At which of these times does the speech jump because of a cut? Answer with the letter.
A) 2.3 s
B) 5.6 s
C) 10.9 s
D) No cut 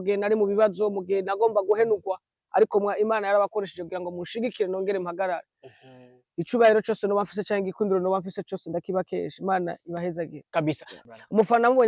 C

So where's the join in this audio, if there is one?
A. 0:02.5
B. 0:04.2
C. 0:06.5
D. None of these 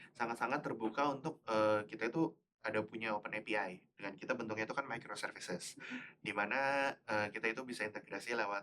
D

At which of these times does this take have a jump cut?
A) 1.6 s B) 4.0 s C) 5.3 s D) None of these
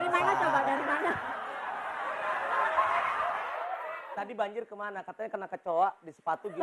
B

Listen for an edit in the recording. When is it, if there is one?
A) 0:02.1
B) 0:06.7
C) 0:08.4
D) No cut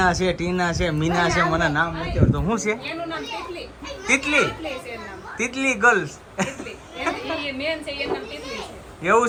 D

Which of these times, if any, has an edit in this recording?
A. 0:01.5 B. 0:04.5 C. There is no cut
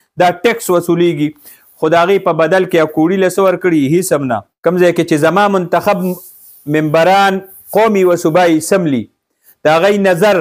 B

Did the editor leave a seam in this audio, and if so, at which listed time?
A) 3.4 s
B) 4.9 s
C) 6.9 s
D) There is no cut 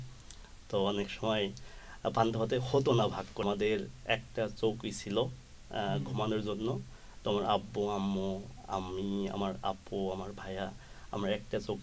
A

